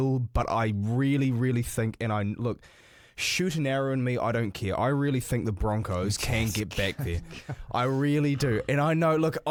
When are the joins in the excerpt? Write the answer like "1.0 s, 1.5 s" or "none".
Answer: none